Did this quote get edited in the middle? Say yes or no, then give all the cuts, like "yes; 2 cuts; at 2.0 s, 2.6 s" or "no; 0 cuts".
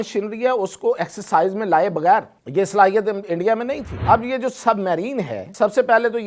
yes; 3 cuts; at 2.4 s, 4.0 s, 5.4 s